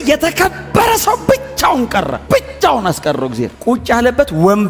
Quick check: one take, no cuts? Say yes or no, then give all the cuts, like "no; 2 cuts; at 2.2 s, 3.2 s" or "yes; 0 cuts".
yes; 0 cuts